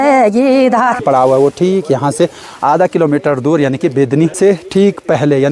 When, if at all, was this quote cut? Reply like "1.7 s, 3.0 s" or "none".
1.0 s, 4.3 s